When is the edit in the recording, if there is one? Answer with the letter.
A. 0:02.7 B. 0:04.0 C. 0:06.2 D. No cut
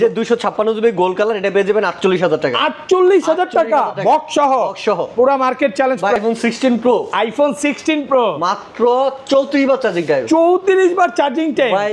C